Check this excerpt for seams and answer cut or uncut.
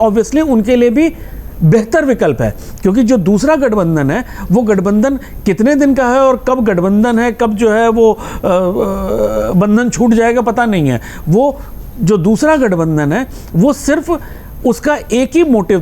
uncut